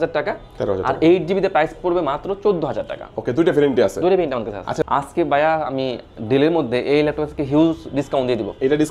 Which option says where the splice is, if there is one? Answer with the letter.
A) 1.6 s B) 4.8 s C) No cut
B